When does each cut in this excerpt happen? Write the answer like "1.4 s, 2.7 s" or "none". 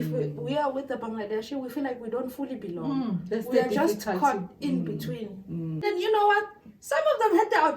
5.8 s